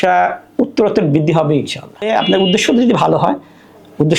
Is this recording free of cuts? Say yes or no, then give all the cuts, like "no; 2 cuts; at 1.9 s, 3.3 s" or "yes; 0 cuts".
no; 1 cut; at 2.1 s